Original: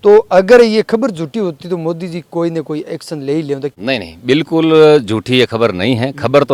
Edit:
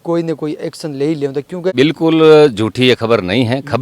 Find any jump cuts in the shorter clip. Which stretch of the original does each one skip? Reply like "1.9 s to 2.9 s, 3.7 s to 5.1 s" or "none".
3.8 s to 4.0 s